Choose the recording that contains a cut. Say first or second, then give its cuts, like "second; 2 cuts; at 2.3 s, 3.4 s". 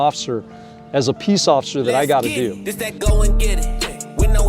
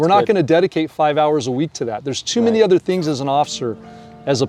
first; 1 cut; at 2.7 s